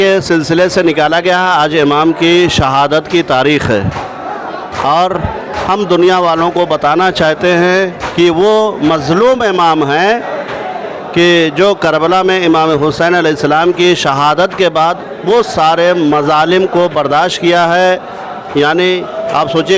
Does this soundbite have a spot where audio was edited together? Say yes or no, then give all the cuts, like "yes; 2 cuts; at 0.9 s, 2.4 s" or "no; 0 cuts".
no; 0 cuts